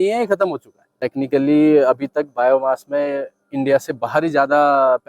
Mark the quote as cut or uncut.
cut